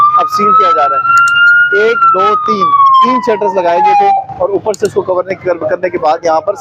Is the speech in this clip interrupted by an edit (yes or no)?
no